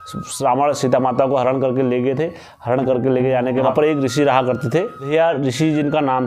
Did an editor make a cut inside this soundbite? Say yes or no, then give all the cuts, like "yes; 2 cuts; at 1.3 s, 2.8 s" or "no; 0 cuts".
yes; 1 cut; at 3.7 s